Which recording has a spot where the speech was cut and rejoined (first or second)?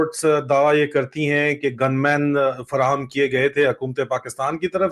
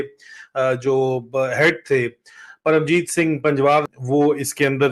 second